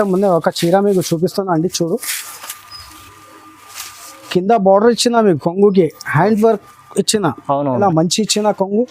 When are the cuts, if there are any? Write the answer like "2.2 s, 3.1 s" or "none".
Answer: 7.8 s